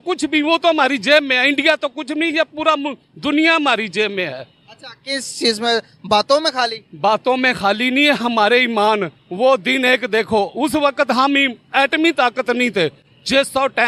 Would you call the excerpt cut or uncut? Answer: uncut